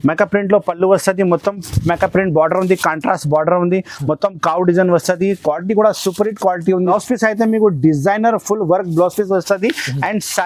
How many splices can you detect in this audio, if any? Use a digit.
1